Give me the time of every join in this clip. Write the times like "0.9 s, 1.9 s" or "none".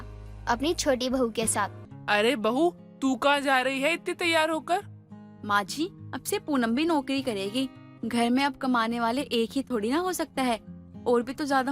1.9 s